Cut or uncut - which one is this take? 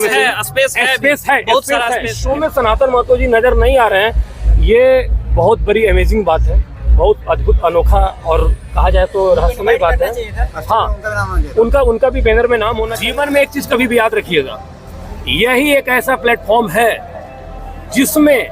cut